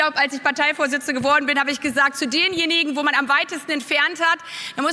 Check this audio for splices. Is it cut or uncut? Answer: uncut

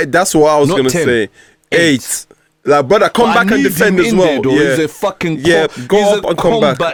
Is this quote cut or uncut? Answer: uncut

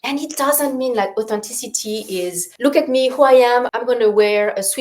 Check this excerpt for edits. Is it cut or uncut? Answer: cut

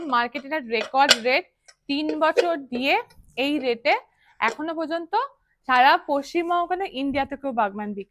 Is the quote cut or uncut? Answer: uncut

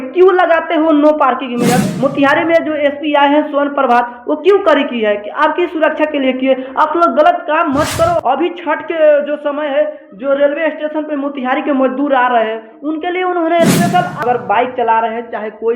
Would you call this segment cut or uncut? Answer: cut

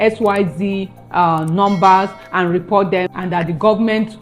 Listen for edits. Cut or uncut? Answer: uncut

